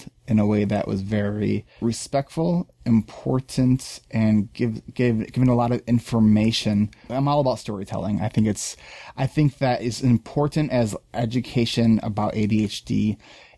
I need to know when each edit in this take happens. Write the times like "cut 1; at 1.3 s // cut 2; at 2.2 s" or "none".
cut 1; at 1.7 s // cut 2; at 7.1 s